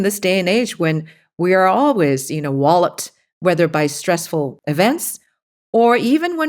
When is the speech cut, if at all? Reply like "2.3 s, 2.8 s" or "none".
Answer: 4.6 s